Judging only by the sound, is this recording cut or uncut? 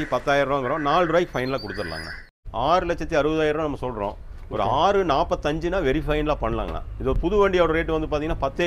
cut